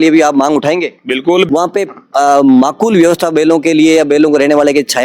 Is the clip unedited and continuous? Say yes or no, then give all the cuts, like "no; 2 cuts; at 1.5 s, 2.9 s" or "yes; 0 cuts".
no; 1 cut; at 1.5 s